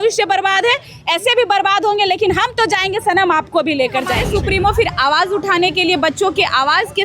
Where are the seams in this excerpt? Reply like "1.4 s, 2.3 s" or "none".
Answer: 4.2 s